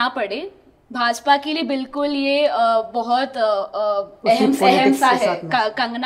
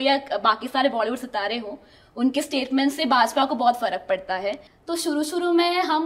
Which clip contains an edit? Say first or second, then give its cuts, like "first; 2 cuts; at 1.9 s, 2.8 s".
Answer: second; 1 cut; at 4.7 s